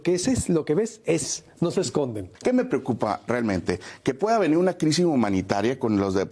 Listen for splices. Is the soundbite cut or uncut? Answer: cut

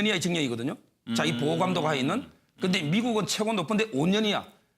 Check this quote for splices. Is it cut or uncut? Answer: cut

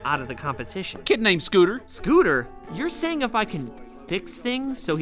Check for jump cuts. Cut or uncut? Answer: cut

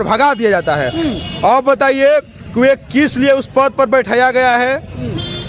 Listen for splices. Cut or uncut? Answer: uncut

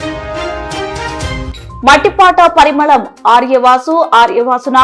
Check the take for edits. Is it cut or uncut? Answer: cut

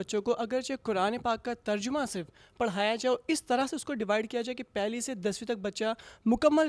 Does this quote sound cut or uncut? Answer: uncut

